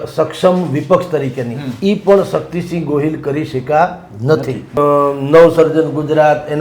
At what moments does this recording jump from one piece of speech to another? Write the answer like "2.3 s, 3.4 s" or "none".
4.7 s